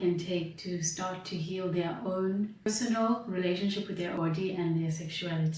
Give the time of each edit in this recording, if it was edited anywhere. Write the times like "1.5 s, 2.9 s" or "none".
2.7 s, 4.1 s